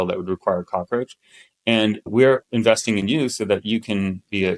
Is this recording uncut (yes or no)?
yes